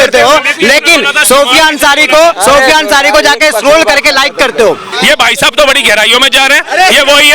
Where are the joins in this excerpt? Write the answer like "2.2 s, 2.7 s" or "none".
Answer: 4.9 s

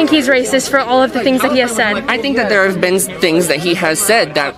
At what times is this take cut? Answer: none

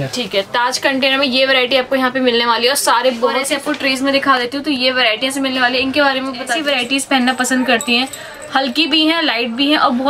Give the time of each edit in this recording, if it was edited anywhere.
3.4 s, 6.5 s

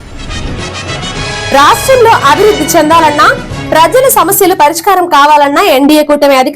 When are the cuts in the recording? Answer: 1.4 s

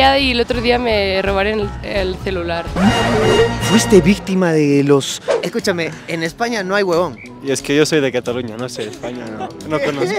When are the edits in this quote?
5.1 s

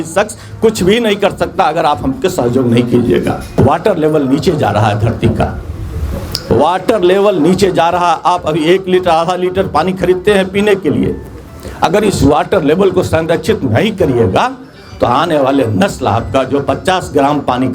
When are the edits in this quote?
3.4 s

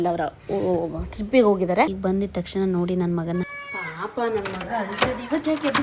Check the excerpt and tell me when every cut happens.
1.9 s

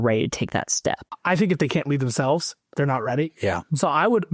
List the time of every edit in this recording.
1.2 s

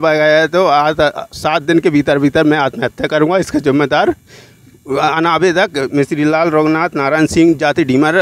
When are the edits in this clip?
none

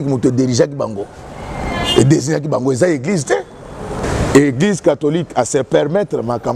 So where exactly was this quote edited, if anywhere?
4.0 s

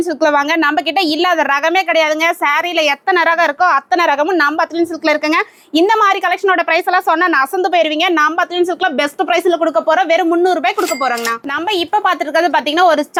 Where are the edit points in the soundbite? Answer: none

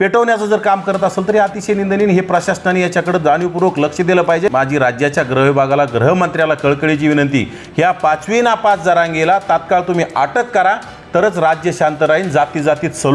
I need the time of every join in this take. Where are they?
4.5 s

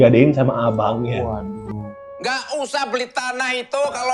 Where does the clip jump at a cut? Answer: 1.9 s

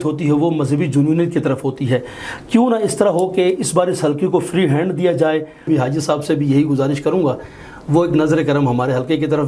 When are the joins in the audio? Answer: 5.7 s

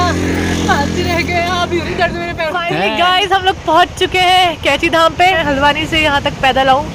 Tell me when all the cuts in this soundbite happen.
2.6 s, 5.4 s

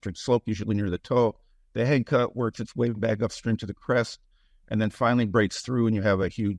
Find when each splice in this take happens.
none

